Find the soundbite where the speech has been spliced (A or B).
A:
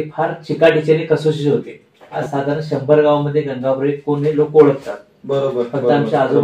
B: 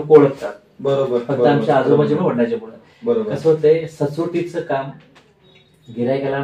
A